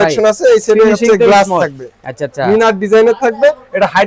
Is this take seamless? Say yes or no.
yes